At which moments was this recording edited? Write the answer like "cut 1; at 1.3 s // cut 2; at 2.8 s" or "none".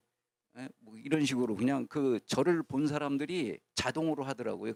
none